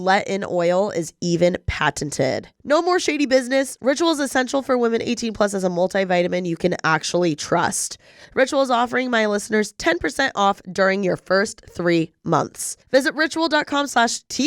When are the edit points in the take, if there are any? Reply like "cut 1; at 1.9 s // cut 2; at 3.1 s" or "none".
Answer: cut 1; at 2.5 s